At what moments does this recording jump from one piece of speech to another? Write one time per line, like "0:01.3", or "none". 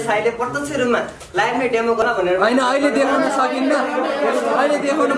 0:02.0